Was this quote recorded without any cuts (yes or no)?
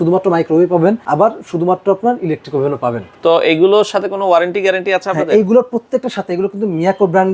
no